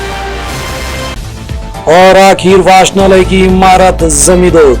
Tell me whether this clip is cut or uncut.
cut